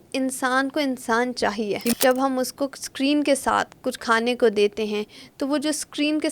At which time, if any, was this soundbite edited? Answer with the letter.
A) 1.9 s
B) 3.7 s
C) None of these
A